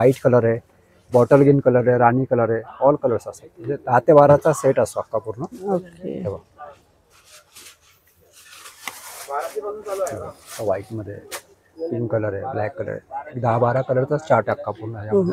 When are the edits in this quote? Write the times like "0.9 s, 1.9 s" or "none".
none